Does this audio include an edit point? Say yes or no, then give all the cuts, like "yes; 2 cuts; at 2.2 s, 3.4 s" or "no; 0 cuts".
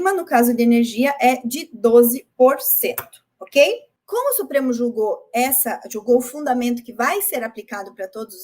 yes; 1 cut; at 3.9 s